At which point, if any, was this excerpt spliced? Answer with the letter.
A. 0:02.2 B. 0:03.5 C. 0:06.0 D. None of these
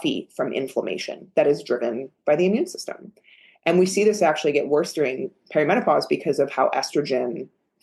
D